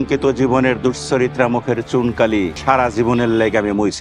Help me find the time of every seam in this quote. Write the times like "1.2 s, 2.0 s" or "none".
2.6 s